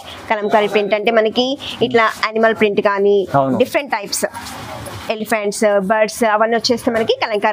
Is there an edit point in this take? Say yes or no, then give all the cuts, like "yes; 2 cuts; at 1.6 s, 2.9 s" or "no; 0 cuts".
no; 0 cuts